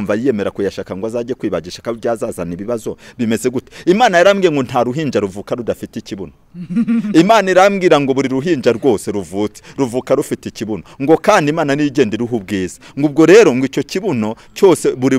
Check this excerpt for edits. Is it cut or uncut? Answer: uncut